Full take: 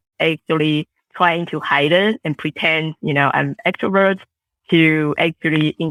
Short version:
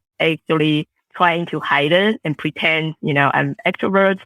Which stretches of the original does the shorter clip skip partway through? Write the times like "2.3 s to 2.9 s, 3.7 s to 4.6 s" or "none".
none